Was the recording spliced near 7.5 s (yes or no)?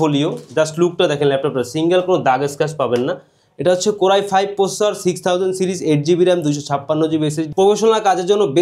yes